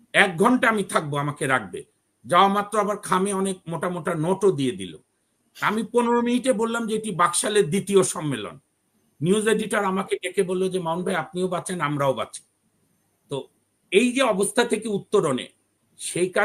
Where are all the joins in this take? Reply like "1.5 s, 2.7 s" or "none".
none